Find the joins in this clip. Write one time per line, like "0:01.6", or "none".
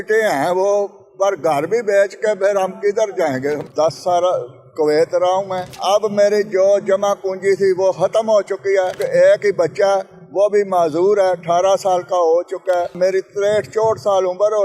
0:03.6
0:05.7
0:09.0
0:12.9